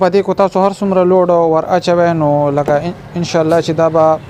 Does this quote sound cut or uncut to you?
uncut